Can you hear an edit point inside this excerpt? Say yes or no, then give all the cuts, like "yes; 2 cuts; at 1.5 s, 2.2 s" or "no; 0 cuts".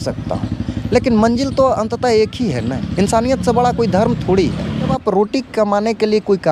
yes; 1 cut; at 4.9 s